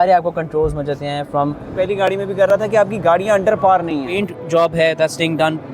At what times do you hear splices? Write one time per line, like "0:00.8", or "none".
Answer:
0:01.7
0:04.1